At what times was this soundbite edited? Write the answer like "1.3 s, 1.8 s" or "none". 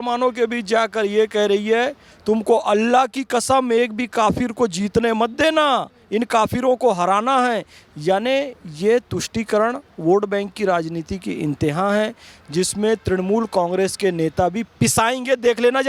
none